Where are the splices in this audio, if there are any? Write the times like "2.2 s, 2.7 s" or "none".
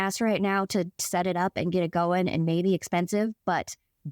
none

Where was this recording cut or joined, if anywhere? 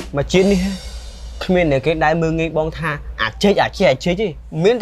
none

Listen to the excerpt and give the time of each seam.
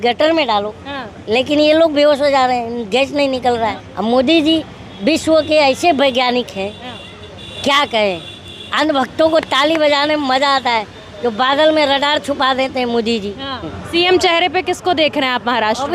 3.8 s, 13.8 s

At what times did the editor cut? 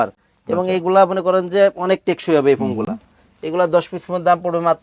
none

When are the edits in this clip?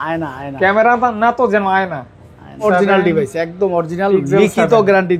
2.6 s

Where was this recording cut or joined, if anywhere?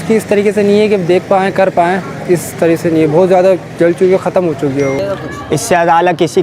5.0 s

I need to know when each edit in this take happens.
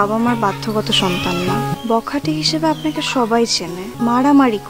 1.7 s, 3.8 s

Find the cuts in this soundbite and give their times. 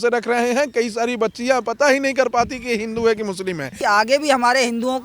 3.8 s

